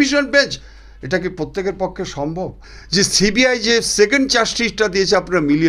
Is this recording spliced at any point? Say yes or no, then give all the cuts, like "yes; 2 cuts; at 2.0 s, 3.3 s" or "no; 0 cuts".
yes; 1 cut; at 2.6 s